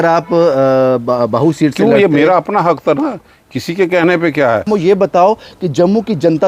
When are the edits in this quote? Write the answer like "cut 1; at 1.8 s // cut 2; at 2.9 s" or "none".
cut 1; at 4.7 s